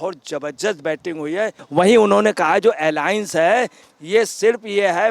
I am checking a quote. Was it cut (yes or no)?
yes